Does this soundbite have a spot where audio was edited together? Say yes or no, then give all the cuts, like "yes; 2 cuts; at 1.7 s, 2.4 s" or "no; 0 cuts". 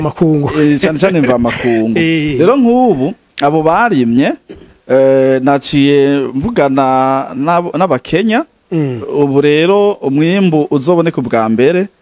no; 0 cuts